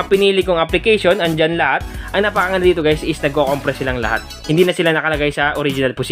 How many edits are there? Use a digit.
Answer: 2